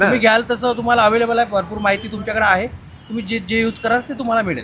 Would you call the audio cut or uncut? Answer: uncut